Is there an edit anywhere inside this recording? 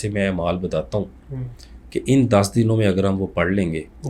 no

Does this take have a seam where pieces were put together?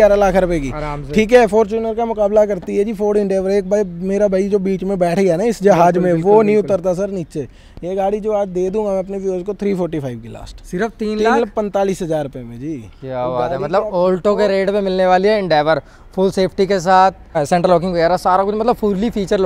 no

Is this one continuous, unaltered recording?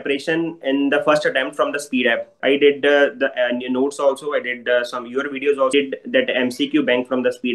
no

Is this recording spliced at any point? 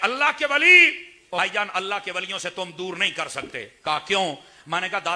yes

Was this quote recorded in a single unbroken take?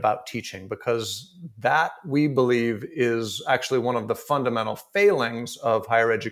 yes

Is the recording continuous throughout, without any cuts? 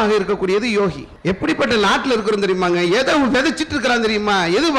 no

